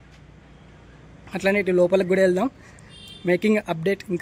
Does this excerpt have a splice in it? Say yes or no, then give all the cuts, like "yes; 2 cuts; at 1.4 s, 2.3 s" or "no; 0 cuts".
no; 0 cuts